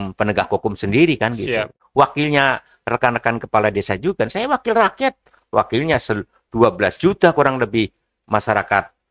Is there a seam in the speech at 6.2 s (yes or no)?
no